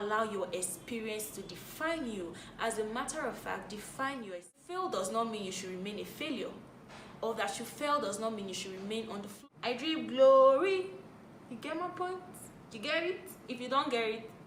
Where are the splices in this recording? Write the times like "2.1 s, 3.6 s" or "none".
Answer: 4.5 s, 9.3 s